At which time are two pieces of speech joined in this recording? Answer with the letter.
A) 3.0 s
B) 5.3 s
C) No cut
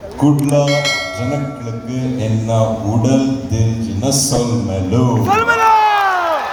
C